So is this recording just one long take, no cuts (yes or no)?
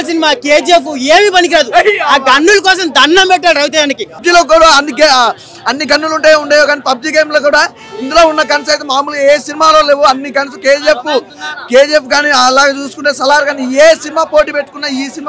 no